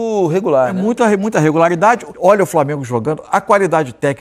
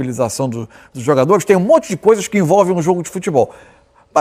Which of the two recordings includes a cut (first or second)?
first